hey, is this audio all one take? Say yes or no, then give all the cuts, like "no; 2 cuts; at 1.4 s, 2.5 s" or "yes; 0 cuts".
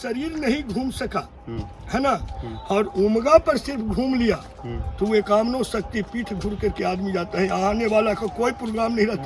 yes; 0 cuts